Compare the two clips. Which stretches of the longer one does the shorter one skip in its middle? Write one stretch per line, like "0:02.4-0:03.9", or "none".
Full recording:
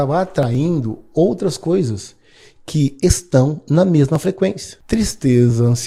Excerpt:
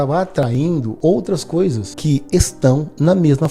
0:00.9-0:01.0
0:02.0-0:02.6